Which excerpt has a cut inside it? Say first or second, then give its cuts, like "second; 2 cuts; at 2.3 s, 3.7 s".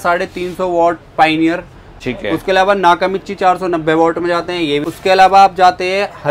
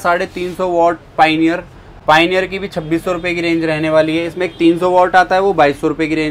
first; 2 cuts; at 1.9 s, 4.9 s